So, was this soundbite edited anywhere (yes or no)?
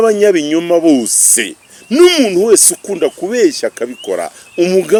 no